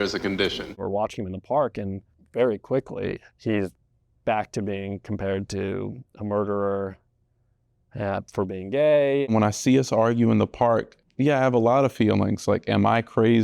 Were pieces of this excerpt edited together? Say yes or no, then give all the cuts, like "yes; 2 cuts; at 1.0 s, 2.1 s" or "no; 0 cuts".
yes; 2 cuts; at 9.2 s, 11.0 s